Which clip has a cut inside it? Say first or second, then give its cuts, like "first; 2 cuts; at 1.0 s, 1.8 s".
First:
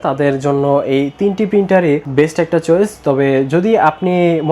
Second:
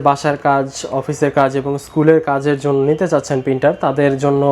first; 1 cut; at 2.1 s